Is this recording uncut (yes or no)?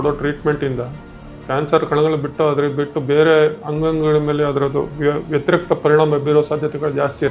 yes